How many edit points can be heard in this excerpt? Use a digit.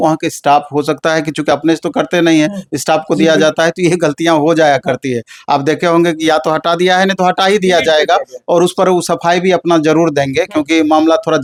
0